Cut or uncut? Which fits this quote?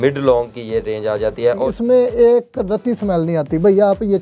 cut